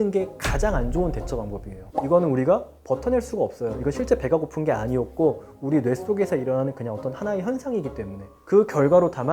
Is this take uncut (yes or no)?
no